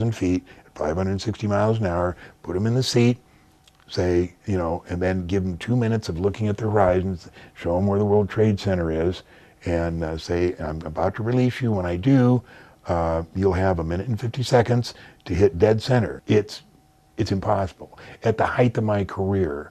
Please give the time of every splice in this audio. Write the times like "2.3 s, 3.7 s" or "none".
16.2 s

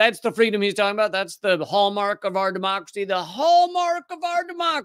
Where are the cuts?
none

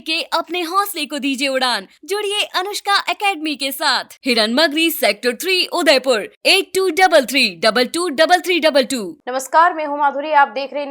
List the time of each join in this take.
9.2 s

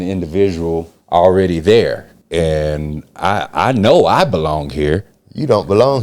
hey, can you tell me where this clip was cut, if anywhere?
0.9 s, 2.1 s

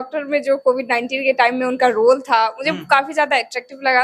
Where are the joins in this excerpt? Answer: none

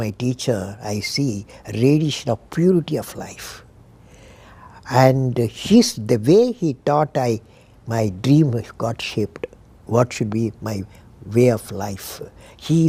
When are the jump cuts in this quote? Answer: none

